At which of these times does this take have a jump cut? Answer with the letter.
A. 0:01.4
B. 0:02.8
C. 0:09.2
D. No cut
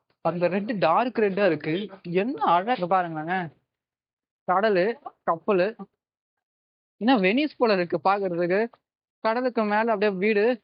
B